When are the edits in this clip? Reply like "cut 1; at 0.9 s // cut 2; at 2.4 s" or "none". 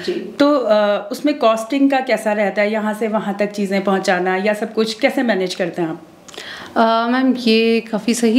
none